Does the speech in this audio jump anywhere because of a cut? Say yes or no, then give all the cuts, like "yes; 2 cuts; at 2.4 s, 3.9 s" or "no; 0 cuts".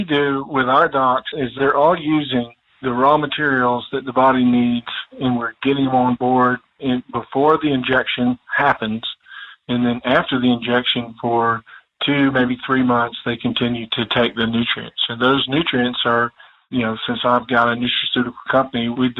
yes; 1 cut; at 1.6 s